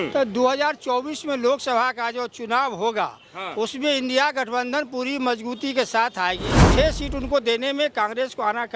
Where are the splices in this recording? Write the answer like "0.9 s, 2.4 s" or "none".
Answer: 6.5 s